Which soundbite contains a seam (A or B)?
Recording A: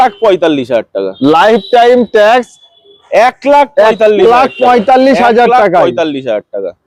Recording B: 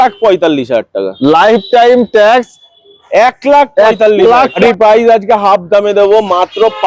B